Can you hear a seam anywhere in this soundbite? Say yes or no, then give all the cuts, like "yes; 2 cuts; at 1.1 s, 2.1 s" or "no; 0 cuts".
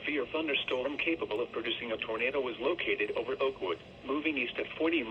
no; 0 cuts